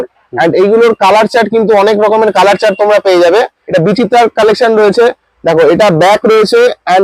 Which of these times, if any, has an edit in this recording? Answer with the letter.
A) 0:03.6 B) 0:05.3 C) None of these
A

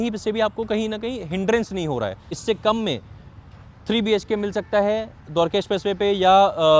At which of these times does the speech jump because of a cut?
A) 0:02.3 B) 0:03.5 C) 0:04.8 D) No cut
A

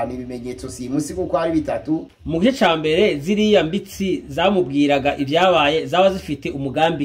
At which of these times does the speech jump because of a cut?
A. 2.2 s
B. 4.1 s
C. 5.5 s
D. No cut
A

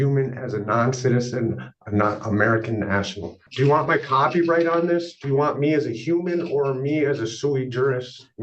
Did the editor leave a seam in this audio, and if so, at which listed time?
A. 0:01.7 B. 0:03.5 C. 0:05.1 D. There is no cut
B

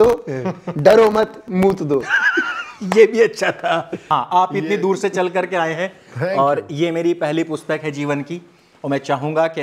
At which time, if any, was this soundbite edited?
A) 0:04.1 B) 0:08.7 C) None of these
A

